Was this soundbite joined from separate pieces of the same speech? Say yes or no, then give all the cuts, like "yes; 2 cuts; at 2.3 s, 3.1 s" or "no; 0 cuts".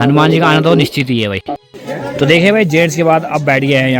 yes; 1 cut; at 1.4 s